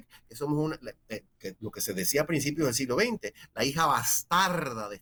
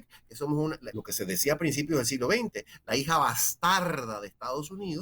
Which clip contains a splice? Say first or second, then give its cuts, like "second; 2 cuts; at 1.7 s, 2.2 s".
second; 1 cut; at 0.9 s